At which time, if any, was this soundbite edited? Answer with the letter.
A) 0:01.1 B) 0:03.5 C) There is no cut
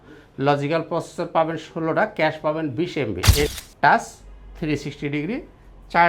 B